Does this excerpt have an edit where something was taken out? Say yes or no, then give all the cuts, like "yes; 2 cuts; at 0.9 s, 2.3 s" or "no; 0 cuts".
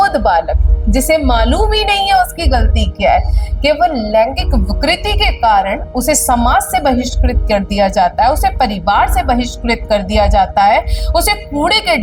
no; 0 cuts